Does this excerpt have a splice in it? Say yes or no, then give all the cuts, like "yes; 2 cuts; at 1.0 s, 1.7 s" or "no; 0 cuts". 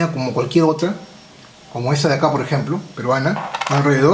no; 0 cuts